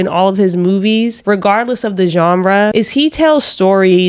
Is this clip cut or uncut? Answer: cut